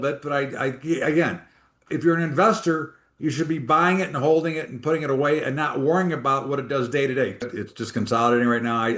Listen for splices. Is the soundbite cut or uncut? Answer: cut